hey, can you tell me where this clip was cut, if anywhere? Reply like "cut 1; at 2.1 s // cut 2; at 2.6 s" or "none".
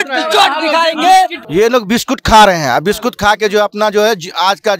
cut 1; at 1.4 s